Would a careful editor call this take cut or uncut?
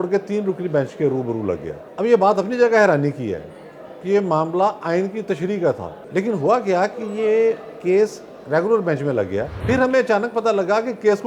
cut